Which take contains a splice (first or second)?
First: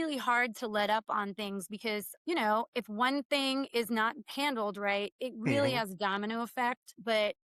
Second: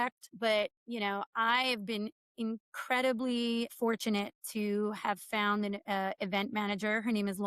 second